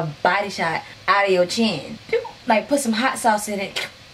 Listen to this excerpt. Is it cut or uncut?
cut